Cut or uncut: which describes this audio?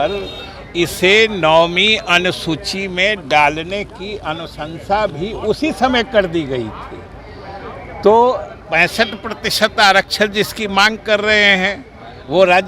uncut